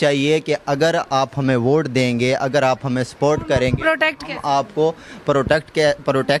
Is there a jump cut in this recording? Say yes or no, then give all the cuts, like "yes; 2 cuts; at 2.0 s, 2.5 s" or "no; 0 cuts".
no; 0 cuts